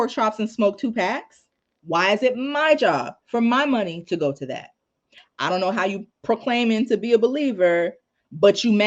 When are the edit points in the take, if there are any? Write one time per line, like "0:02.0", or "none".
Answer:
0:05.2